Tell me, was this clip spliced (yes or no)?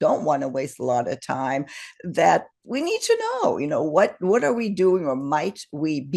no